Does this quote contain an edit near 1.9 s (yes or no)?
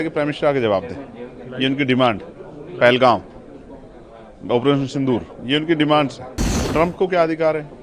no